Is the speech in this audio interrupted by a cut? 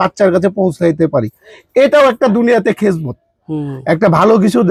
no; 0 cuts

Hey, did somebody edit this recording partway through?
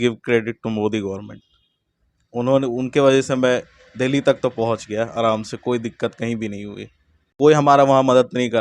yes; 1 cut; at 7.3 s

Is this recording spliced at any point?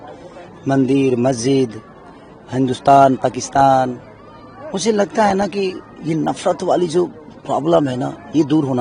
no; 0 cuts

